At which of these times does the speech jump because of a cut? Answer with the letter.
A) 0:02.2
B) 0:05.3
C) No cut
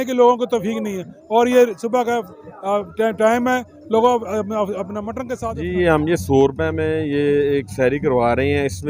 B